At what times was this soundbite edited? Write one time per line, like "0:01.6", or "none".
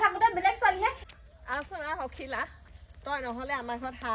0:01.0